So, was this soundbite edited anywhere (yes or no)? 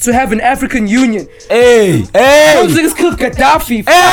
no